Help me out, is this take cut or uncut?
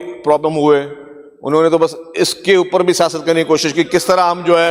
uncut